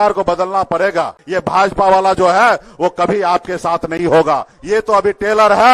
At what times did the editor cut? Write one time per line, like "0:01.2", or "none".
0:01.2
0:04.5